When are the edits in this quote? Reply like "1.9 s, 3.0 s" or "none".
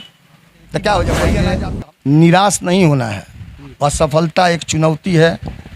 1.4 s